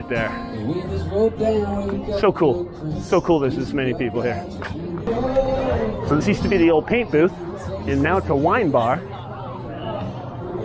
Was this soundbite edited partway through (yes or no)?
yes